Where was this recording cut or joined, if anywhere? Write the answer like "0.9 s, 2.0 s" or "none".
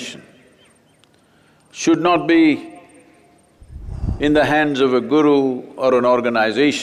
none